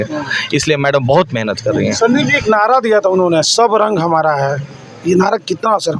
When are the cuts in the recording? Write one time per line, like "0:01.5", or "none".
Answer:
none